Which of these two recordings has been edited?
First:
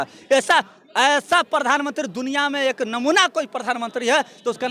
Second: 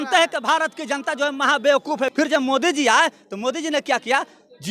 second; 1 cut; at 2.1 s

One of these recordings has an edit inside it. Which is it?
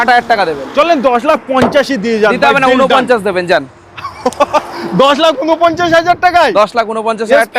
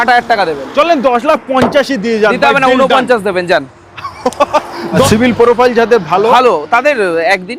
second; 1 cut; at 5.1 s

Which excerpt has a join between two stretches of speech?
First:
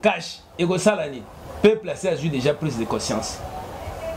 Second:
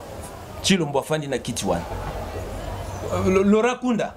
second; 1 cut; at 1.9 s

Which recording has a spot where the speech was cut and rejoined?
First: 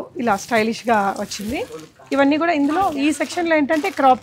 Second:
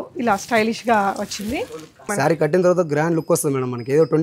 second; 1 cut; at 2.1 s

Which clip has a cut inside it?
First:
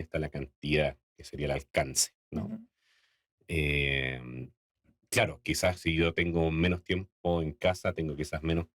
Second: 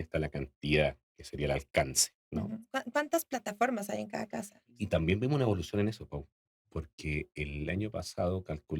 second; 2 cuts; at 2.7 s, 4.8 s

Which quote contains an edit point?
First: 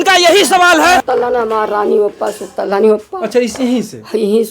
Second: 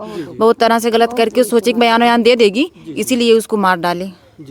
first; 1 cut; at 1.0 s

